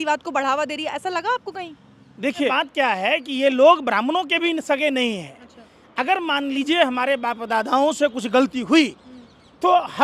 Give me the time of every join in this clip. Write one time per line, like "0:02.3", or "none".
0:02.5